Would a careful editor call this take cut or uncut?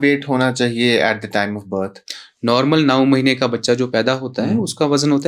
uncut